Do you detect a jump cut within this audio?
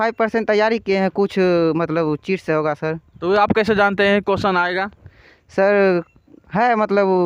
no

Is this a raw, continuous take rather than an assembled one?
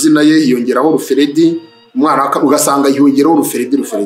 yes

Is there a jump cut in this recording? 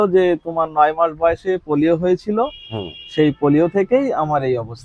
no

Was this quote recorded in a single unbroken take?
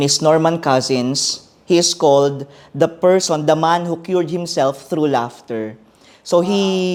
yes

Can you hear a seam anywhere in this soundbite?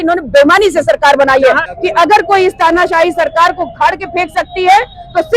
yes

